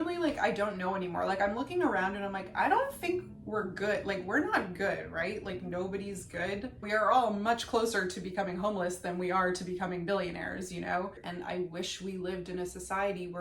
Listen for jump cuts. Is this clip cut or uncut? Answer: cut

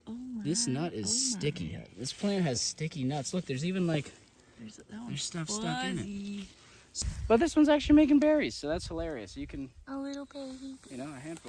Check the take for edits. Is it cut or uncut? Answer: cut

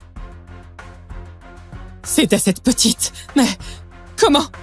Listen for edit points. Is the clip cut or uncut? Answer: cut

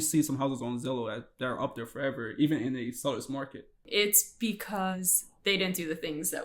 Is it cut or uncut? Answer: cut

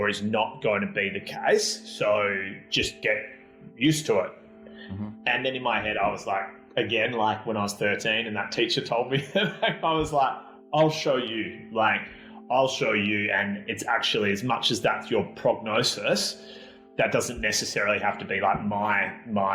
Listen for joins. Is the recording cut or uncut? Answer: uncut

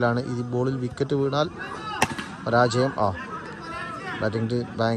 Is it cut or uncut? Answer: uncut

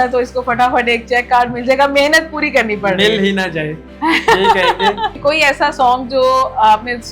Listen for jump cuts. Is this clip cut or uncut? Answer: cut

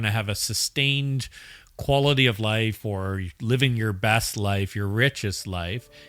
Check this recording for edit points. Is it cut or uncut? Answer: uncut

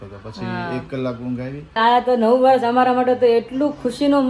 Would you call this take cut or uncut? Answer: cut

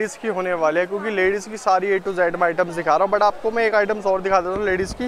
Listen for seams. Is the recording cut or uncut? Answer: uncut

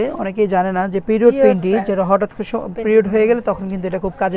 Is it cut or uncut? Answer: uncut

